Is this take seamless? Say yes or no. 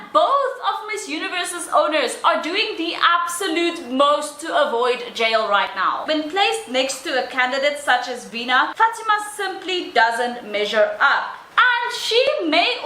no